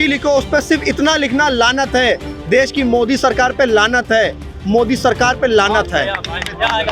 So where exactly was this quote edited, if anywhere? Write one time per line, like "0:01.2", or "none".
none